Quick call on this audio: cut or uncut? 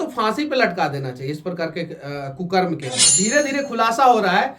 cut